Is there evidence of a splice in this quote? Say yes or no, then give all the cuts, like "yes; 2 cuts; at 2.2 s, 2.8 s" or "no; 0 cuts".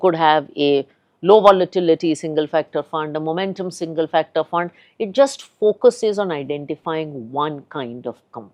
no; 0 cuts